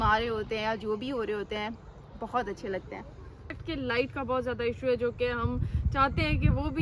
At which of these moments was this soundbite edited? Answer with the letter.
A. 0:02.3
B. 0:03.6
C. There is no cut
B